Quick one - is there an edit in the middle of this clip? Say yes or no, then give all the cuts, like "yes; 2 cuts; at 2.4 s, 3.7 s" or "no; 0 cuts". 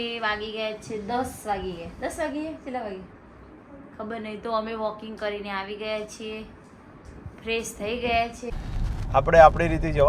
yes; 1 cut; at 8.5 s